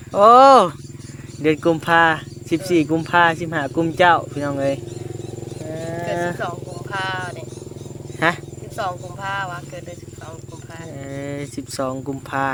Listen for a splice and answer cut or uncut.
uncut